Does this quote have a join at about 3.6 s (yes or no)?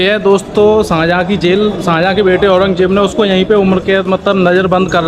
no